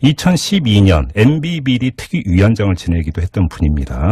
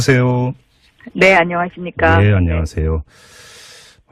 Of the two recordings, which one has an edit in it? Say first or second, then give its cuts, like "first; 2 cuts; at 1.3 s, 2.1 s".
first; 1 cut; at 1.5 s